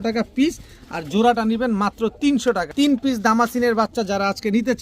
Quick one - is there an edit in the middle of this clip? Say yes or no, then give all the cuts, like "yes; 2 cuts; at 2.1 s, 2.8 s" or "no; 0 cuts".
yes; 1 cut; at 2.7 s